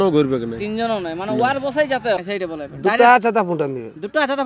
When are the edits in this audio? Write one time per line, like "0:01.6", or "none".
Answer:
0:02.2